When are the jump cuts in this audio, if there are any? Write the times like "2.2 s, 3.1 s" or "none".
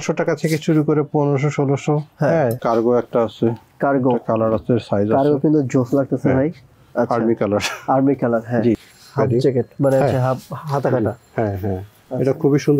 2.6 s, 8.8 s